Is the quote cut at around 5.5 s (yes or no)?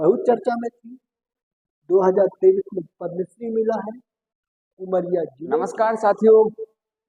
yes